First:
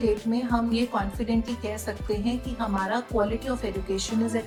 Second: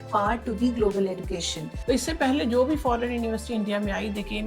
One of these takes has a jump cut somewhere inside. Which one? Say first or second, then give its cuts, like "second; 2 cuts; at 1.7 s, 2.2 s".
second; 1 cut; at 1.7 s